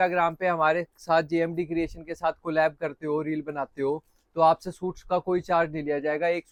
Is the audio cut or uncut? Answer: uncut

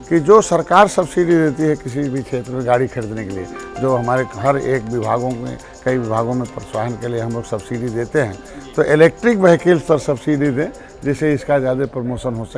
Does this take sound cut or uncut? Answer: uncut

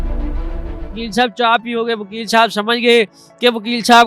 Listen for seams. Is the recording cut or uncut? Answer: cut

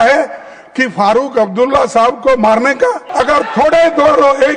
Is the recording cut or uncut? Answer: cut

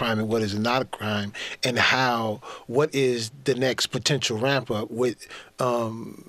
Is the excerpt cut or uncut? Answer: uncut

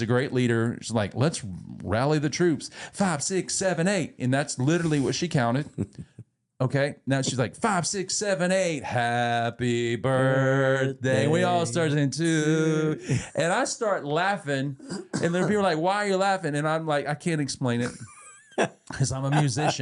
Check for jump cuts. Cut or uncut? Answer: uncut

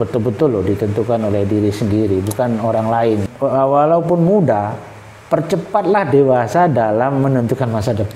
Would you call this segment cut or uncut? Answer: cut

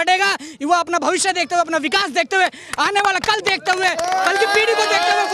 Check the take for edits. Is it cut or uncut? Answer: uncut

